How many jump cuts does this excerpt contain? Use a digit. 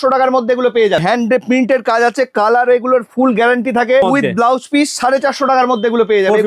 2